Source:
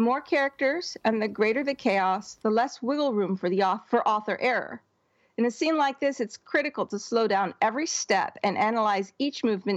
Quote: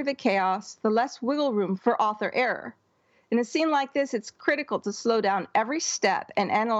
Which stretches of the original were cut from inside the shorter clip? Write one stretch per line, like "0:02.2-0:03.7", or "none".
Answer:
0:03.4-0:03.8